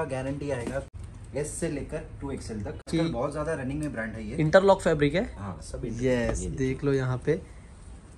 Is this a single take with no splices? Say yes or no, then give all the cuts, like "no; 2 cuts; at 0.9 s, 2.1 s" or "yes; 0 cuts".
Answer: no; 2 cuts; at 0.9 s, 2.9 s